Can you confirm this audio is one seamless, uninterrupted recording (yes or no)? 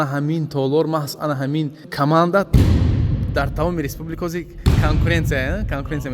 no